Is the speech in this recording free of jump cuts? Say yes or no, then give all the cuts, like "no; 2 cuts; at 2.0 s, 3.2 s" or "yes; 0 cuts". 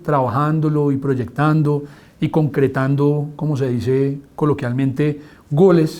yes; 0 cuts